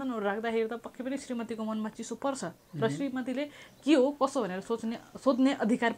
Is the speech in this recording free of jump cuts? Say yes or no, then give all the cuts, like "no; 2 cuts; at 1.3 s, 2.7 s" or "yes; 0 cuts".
yes; 0 cuts